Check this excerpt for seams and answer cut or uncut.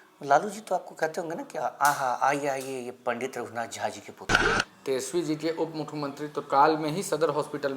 cut